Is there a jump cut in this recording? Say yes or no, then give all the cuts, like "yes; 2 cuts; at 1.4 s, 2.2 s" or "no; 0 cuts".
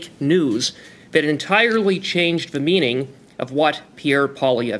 no; 0 cuts